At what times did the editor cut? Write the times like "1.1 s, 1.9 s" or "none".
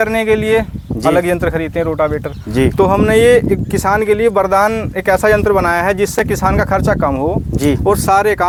none